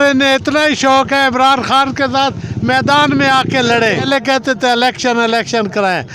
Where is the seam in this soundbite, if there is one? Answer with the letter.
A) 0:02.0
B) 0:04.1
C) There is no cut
B